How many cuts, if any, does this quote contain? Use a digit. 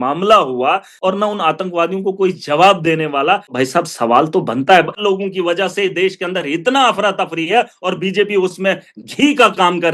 3